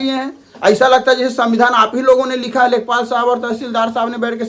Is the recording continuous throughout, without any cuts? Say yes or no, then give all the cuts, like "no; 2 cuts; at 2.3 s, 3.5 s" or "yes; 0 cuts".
yes; 0 cuts